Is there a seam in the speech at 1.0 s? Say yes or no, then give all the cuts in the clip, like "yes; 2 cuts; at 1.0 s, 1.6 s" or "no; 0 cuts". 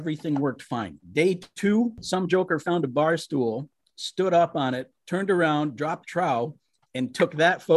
yes; 3 cuts; at 1.0 s, 2.0 s, 4.9 s